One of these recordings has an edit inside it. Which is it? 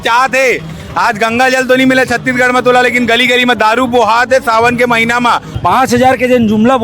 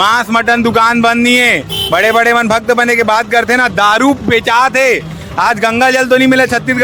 first; 1 cut; at 5.5 s

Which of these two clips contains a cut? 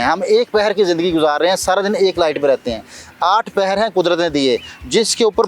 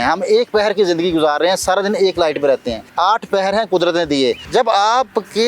second; 2 cuts; at 2.8 s, 4.4 s

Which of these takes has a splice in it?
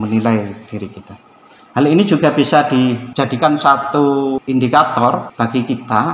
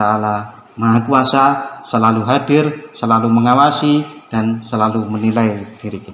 first; 3 cuts; at 3.1 s, 4.4 s, 5.3 s

